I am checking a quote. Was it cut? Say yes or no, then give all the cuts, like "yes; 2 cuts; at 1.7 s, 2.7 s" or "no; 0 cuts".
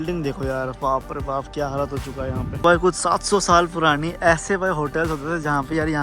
yes; 1 cut; at 2.6 s